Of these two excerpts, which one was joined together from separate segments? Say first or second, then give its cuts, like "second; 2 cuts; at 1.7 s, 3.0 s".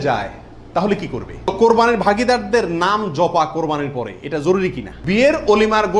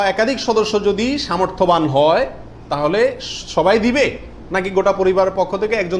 first; 2 cuts; at 1.5 s, 4.9 s